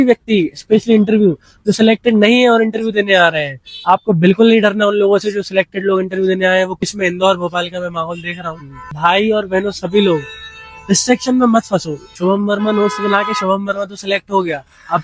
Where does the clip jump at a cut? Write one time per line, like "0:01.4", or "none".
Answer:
0:06.9
0:08.8
0:12.2